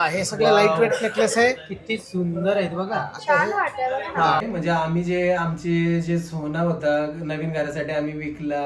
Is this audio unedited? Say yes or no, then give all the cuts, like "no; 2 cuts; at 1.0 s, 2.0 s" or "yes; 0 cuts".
no; 1 cut; at 4.4 s